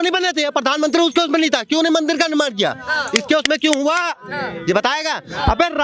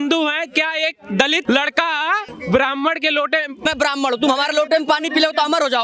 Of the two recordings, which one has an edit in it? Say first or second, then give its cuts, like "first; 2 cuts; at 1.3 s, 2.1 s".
second; 3 cuts; at 1.4 s, 2.3 s, 3.6 s